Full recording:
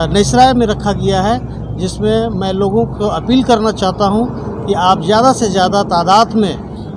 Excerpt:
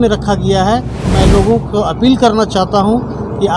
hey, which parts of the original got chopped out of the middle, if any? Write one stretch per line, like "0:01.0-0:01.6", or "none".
0:01.6-0:02.3

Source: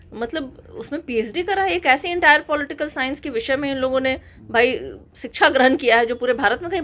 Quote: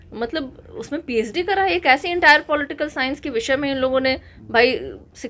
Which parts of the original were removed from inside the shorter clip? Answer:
none

